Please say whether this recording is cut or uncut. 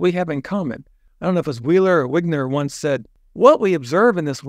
cut